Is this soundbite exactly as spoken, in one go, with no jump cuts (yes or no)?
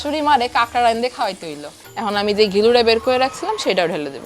no